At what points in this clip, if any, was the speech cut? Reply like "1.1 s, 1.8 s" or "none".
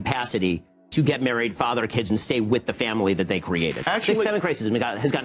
3.8 s